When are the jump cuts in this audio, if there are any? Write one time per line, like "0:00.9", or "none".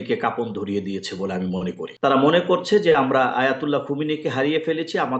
0:01.8